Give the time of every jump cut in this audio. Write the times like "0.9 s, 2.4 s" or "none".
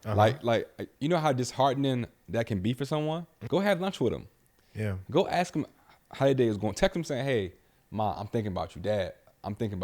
3.3 s